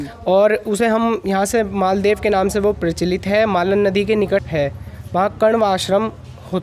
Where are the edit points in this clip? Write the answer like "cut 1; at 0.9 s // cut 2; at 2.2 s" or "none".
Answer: cut 1; at 4.5 s